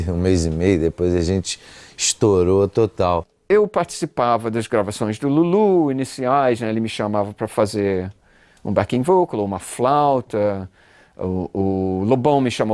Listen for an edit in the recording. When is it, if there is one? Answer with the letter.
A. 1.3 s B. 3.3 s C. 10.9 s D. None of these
B